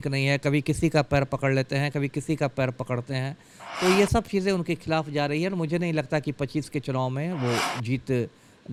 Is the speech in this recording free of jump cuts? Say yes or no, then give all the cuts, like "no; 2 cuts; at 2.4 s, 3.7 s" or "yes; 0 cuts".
yes; 0 cuts